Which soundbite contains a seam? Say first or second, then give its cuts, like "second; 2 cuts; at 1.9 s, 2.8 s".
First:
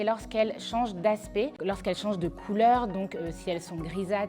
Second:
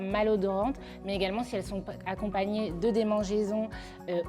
first; 1 cut; at 1.6 s